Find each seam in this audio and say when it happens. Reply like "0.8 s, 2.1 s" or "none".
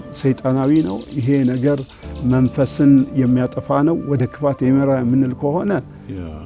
none